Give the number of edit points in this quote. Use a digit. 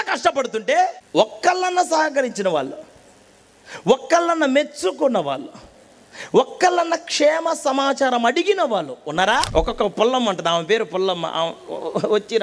2